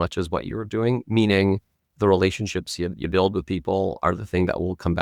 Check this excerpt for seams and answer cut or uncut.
cut